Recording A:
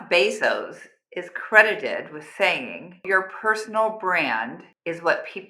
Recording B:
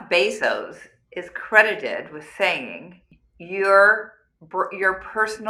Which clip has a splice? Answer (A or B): A